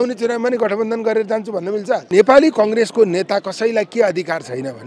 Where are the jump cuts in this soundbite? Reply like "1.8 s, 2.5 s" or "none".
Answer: 2.0 s